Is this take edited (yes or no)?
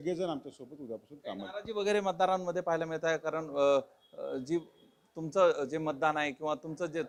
no